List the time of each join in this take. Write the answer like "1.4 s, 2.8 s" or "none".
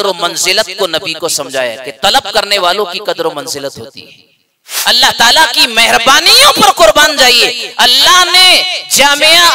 4.7 s